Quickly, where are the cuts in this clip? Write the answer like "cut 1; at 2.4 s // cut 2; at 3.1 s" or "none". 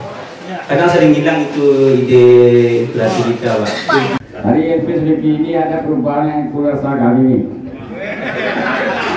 cut 1; at 4.2 s

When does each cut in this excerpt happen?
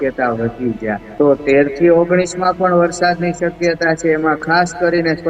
cut 1; at 1.1 s

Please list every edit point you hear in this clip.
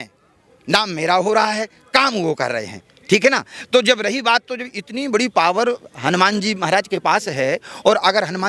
none

